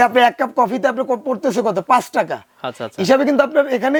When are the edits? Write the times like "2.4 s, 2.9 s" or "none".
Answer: none